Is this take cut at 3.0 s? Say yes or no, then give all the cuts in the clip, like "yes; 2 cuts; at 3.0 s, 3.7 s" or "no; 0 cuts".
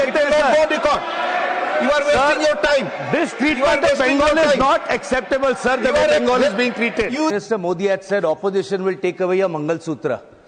no; 1 cut; at 7.3 s